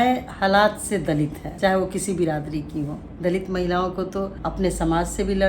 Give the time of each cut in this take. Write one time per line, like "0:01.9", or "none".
0:01.4
0:03.0
0:04.4